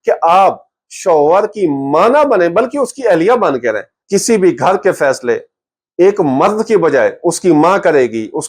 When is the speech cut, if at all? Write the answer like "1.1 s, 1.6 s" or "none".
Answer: 3.9 s